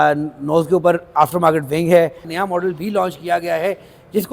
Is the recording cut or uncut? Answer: cut